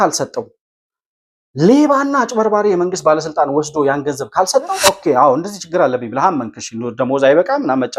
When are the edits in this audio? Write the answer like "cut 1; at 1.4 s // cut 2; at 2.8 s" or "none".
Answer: cut 1; at 4.7 s